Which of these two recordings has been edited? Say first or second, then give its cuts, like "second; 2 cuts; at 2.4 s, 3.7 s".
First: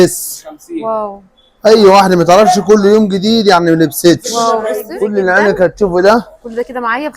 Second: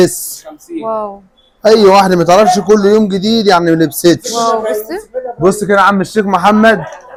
first; 1 cut; at 4.9 s